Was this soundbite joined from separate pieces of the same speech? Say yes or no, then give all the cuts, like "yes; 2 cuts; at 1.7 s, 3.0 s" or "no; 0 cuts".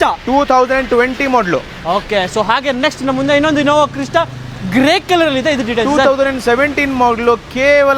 no; 0 cuts